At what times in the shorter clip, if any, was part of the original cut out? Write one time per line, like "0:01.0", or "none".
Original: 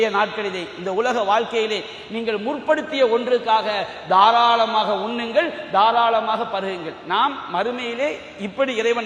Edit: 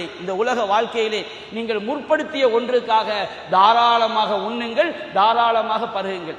none